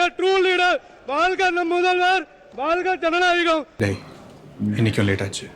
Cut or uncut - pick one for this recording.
cut